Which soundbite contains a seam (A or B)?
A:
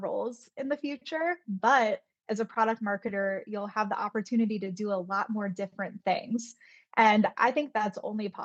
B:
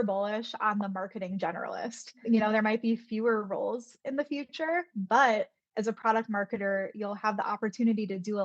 B